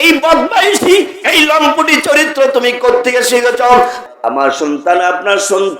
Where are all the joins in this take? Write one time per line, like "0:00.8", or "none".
0:04.0